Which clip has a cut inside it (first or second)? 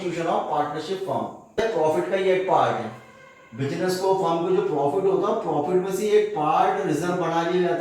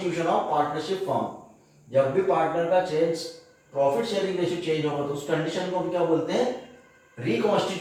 first